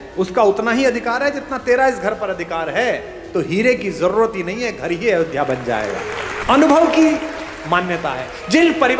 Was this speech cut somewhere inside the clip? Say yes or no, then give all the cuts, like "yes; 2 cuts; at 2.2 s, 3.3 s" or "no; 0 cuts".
yes; 1 cut; at 6.3 s